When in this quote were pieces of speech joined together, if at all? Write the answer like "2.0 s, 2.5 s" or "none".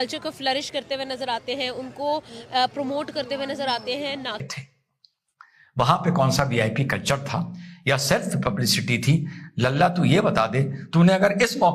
4.4 s